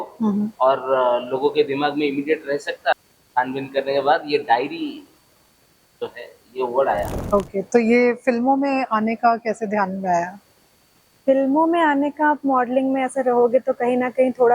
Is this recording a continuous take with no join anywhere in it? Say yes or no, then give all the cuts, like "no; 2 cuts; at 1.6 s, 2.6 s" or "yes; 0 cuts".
no; 2 cuts; at 2.9 s, 7.2 s